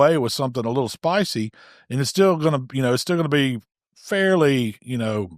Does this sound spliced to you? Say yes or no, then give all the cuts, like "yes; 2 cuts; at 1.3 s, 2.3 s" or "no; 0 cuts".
no; 0 cuts